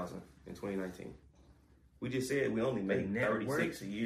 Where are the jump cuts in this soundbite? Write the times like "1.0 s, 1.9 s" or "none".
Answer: none